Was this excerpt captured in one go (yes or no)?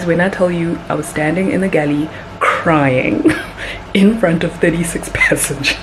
yes